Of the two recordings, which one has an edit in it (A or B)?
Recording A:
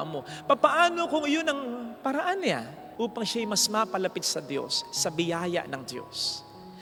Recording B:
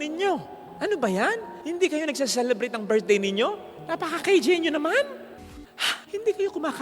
B